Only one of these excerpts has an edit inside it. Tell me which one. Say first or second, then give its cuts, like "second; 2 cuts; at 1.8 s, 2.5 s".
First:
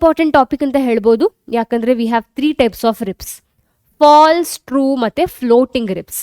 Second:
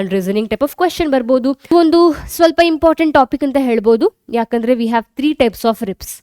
second; 1 cut; at 1.7 s